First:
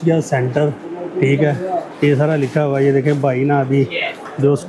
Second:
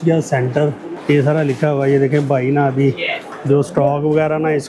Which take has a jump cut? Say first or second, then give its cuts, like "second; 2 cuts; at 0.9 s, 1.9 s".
second; 1 cut; at 1.0 s